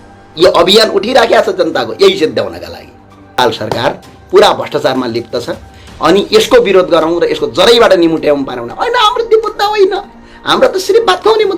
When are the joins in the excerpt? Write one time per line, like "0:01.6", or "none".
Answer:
0:03.3